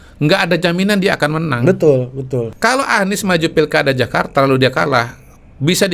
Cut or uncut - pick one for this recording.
cut